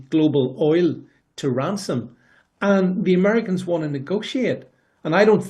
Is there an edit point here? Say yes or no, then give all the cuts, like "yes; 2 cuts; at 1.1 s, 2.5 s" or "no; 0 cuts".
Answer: no; 0 cuts